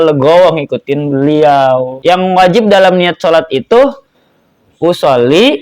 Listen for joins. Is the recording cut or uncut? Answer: cut